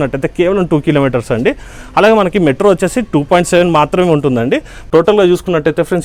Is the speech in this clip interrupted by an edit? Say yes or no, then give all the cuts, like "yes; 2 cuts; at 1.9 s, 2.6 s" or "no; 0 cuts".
yes; 1 cut; at 4.7 s